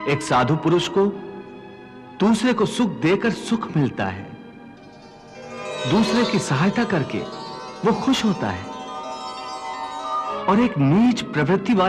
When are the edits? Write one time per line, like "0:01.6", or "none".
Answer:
0:10.4